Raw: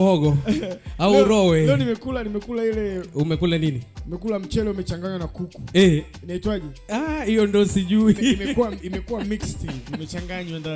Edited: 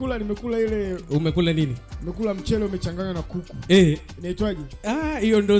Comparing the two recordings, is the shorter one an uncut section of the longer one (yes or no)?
yes